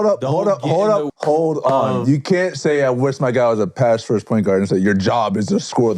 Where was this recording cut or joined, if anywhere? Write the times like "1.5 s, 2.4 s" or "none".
1.1 s